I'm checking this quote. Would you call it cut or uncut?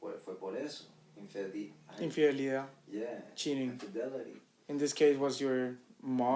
uncut